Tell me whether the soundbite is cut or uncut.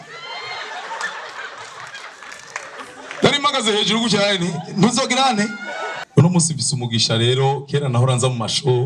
cut